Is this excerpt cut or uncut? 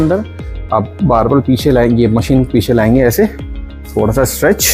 uncut